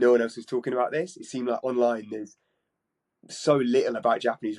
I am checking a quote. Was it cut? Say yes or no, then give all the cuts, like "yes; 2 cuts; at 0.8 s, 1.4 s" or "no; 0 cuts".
no; 0 cuts